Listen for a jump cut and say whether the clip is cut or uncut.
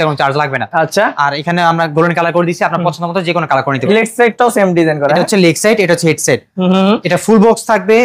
uncut